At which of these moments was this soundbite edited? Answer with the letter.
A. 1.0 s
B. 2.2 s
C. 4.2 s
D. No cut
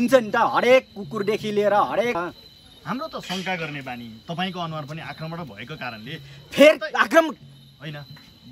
B